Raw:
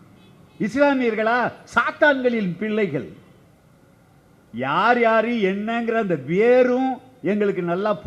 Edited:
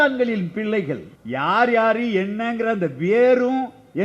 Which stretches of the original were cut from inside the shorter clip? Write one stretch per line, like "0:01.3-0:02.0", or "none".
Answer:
0:03.2-0:04.4